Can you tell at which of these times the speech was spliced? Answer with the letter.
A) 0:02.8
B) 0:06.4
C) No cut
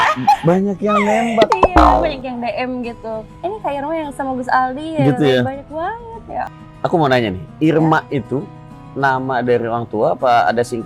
B